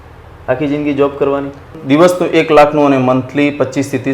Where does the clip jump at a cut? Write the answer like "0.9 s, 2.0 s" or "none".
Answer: 1.8 s